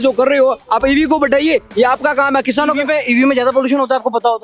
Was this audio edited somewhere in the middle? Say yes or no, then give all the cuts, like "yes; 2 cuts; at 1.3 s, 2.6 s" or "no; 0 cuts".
no; 0 cuts